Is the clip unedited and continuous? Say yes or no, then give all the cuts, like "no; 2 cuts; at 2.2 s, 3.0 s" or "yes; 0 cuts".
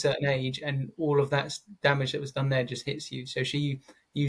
yes; 0 cuts